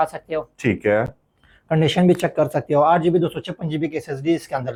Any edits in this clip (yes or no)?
no